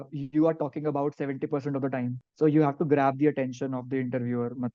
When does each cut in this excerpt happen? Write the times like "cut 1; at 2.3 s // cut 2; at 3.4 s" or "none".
cut 1; at 2.2 s